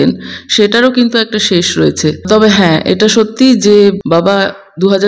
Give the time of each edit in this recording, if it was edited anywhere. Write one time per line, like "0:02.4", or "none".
0:02.3
0:04.0